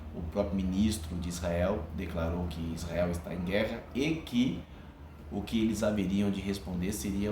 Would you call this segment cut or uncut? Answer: uncut